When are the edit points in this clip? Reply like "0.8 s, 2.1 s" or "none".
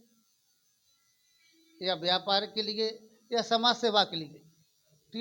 none